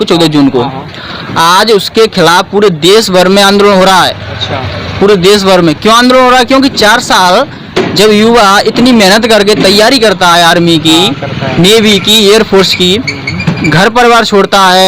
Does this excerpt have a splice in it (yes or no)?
no